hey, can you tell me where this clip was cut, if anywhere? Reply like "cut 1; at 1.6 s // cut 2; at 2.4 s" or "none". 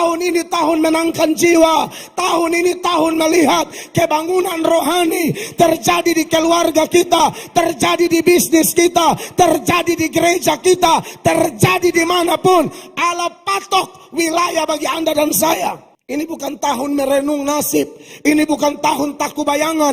cut 1; at 15.9 s